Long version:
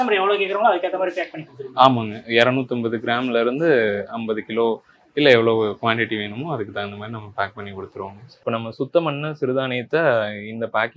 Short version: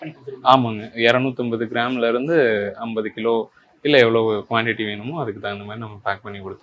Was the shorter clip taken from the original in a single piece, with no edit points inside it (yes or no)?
yes